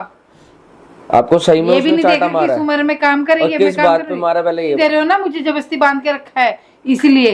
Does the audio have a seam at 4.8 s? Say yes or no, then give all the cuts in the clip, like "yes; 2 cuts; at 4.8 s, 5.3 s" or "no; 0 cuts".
yes; 1 cut; at 4.8 s